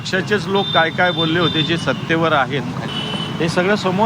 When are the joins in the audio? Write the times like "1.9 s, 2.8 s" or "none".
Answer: 2.9 s